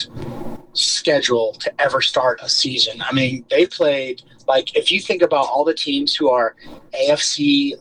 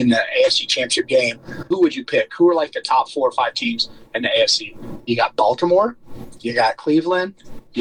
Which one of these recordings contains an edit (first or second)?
second